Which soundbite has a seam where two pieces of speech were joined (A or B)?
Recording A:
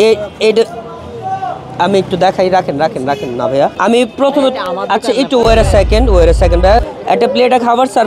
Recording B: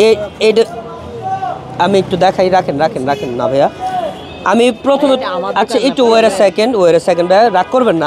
A